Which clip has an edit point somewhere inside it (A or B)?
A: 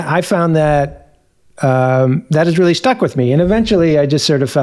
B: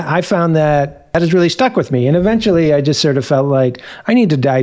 B